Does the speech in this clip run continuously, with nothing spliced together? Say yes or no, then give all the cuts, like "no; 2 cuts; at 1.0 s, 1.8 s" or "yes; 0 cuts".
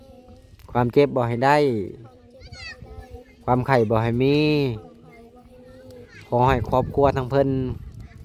yes; 0 cuts